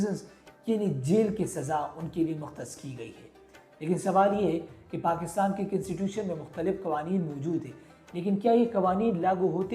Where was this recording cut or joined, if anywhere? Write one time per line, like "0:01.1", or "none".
none